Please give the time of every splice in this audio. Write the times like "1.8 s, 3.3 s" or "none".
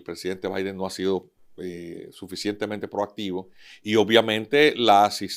none